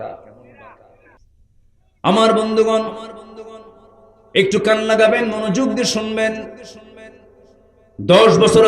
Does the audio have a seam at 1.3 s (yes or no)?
yes